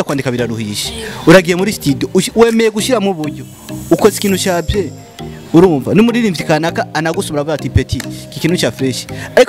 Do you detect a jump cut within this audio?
no; 0 cuts

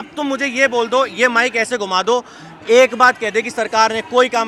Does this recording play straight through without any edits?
yes; 0 cuts

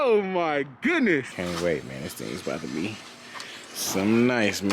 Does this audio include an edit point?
yes; 1 cut; at 1.3 s

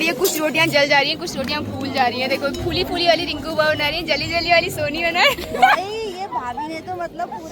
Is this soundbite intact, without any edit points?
yes; 0 cuts

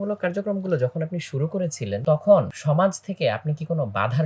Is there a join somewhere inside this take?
yes; 2 cuts; at 2.0 s, 2.5 s

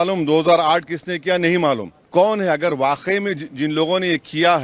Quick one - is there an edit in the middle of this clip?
yes; 1 cut; at 1.9 s

